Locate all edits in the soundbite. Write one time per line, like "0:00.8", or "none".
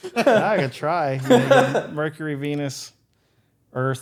none